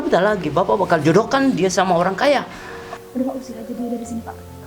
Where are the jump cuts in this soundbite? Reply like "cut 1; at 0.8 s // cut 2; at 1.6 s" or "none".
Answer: cut 1; at 2.9 s